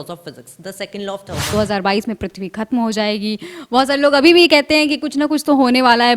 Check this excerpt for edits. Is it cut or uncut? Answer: cut